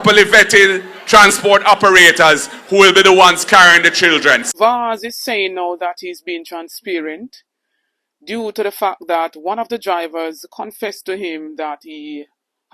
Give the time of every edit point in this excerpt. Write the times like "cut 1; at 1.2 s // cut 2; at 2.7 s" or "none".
cut 1; at 4.4 s